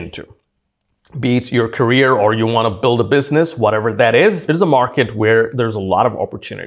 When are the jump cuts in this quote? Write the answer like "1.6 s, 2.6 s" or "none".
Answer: 4.4 s, 5.5 s